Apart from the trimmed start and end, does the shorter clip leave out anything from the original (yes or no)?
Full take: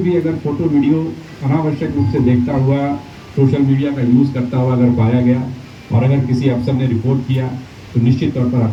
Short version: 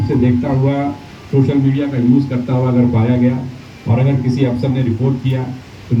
no